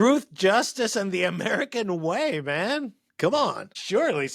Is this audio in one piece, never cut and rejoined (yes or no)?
yes